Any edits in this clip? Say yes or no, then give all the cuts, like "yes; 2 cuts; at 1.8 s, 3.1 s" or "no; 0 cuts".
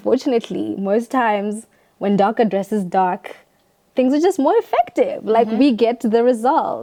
no; 0 cuts